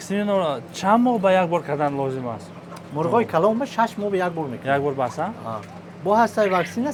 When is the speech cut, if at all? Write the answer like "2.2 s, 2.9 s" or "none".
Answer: none